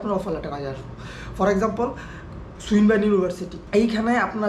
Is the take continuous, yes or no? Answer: no